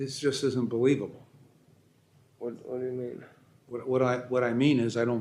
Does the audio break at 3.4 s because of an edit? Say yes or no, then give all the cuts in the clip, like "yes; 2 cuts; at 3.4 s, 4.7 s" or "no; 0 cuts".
no; 0 cuts